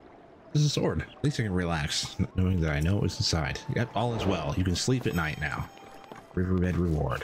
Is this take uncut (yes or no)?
no